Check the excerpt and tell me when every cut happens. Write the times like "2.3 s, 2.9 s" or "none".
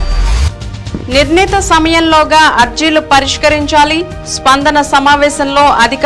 0.9 s